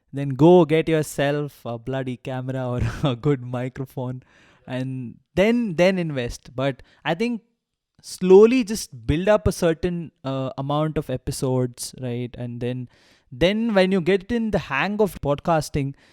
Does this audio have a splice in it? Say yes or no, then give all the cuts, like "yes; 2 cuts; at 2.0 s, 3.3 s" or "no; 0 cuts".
yes; 1 cut; at 15.1 s